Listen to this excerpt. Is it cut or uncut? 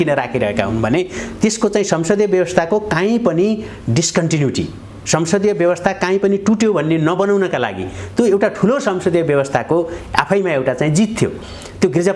uncut